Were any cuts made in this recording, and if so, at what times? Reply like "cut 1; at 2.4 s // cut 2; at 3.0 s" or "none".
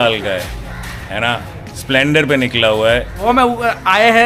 cut 1; at 3.2 s